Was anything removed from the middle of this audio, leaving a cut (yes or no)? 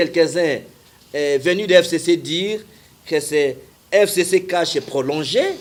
no